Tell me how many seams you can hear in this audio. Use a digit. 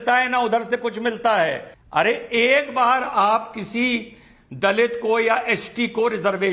1